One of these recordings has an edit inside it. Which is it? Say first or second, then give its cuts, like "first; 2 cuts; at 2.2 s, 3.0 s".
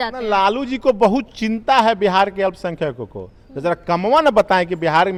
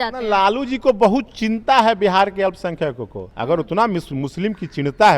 second; 1 cut; at 3.2 s